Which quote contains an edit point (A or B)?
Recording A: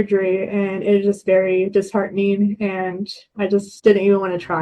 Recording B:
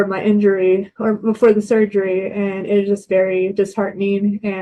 A